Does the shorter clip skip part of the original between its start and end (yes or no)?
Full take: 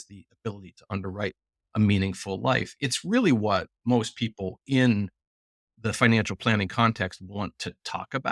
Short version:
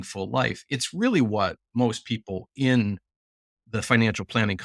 no